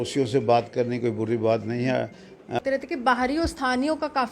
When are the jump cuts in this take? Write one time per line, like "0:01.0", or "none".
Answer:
0:02.6